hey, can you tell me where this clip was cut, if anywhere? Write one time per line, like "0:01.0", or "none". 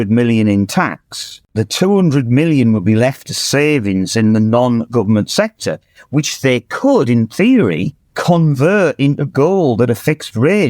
0:01.4